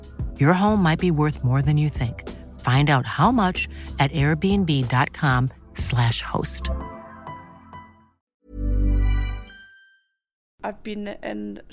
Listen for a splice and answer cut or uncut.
cut